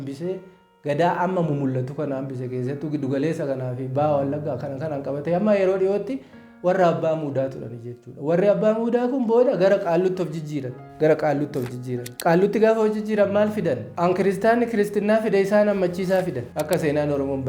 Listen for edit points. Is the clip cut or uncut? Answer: cut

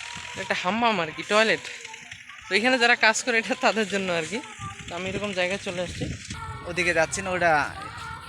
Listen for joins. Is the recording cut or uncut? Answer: cut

